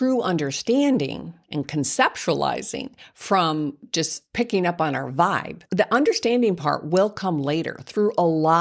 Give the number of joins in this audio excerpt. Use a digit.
2